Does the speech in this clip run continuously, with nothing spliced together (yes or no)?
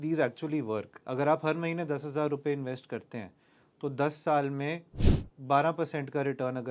no